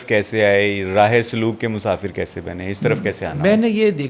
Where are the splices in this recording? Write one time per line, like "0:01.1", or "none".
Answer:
none